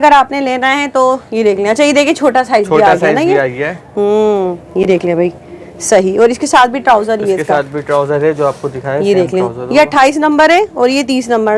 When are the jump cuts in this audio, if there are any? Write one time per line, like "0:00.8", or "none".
none